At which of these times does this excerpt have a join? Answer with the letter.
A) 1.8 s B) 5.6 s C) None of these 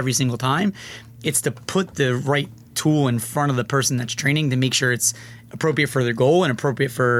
C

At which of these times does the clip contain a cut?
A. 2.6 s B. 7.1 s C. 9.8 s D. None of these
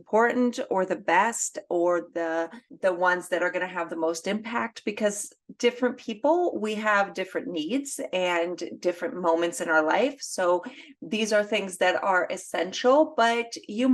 A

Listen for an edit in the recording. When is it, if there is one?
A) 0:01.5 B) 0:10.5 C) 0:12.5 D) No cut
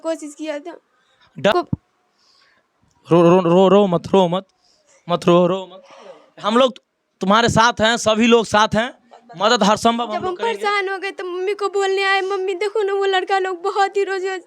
A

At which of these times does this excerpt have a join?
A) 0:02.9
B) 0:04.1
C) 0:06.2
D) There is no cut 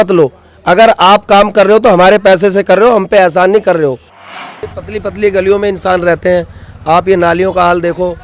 B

